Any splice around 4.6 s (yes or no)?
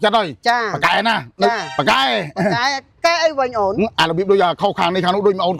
no